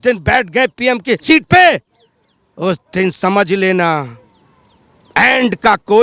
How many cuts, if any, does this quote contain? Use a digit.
1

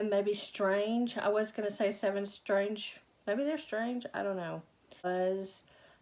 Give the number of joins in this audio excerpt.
1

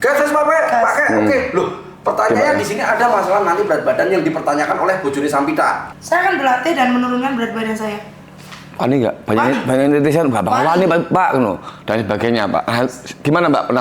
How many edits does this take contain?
1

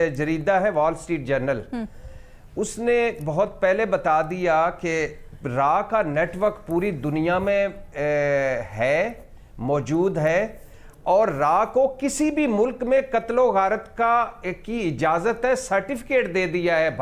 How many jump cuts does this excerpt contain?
0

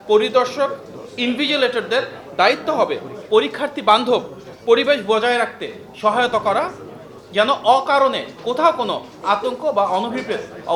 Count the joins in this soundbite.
0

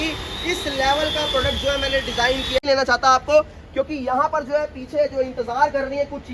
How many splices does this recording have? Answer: 1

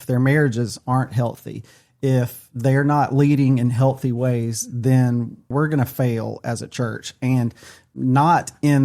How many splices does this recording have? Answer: 2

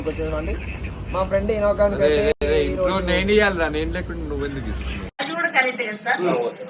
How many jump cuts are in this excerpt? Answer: 1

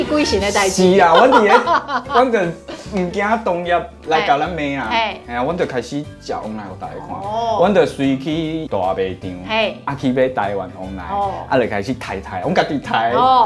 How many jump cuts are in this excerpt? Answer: 0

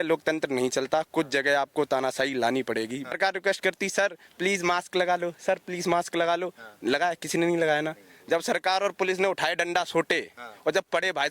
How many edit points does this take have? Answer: 1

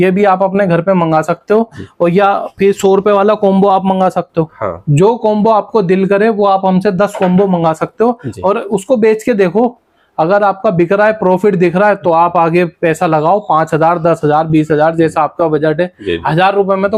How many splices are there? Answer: 0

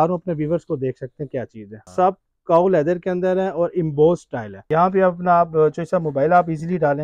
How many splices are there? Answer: 2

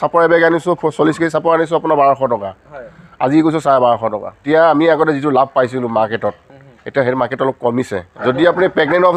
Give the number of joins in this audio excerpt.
2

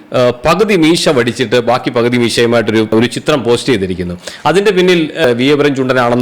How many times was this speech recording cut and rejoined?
1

